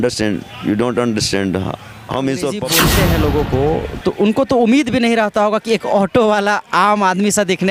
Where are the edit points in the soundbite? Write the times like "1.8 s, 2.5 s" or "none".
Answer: 2.7 s